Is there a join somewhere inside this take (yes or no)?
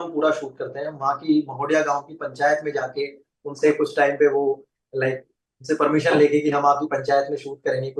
no